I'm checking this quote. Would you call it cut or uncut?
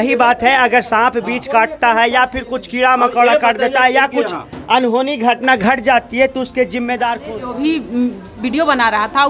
cut